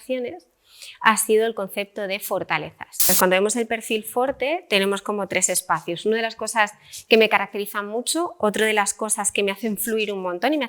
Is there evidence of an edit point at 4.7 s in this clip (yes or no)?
no